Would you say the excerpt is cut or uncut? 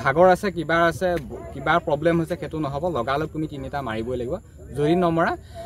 uncut